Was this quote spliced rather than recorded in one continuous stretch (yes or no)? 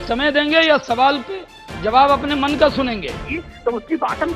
yes